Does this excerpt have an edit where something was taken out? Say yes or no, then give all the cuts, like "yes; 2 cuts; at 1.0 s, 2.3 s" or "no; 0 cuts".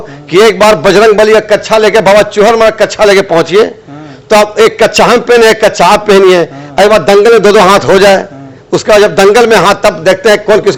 no; 0 cuts